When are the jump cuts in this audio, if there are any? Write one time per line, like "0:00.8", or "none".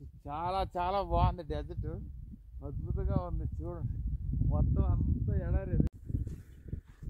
0:05.9